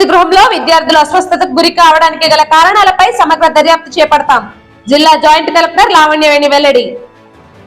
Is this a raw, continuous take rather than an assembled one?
yes; 0 cuts

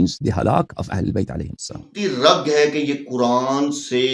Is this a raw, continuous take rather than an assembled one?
no; 1 cut; at 1.9 s

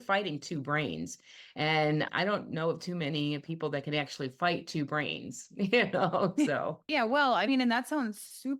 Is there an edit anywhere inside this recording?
no; 0 cuts

